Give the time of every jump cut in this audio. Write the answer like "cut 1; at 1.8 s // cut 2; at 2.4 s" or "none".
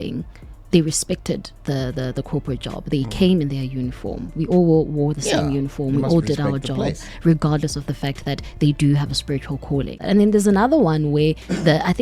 cut 1; at 10.0 s